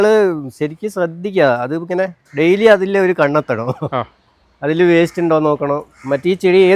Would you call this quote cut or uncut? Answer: uncut